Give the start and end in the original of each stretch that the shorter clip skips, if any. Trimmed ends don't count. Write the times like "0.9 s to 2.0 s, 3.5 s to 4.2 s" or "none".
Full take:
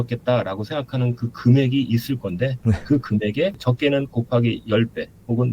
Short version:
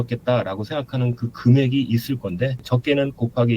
2.6 s to 3.5 s